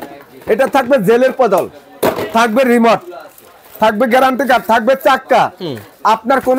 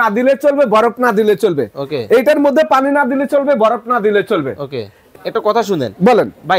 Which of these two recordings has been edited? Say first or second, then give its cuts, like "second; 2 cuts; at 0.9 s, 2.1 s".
second; 1 cut; at 5.1 s